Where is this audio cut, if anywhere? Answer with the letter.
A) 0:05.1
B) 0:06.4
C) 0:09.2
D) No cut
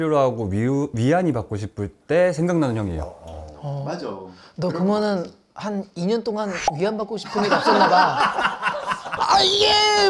C